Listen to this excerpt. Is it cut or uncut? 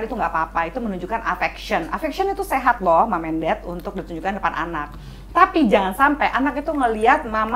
uncut